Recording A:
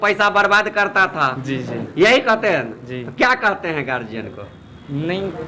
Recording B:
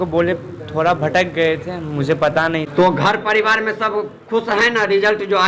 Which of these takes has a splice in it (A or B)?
B